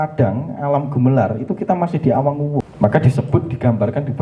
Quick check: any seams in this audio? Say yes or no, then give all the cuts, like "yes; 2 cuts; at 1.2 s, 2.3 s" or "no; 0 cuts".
yes; 1 cut; at 2.7 s